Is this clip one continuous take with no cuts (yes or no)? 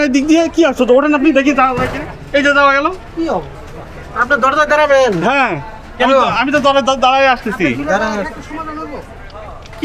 yes